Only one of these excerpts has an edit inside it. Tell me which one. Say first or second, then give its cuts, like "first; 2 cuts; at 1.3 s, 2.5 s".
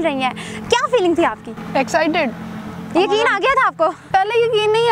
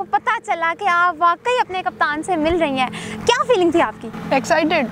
first; 1 cut; at 4.0 s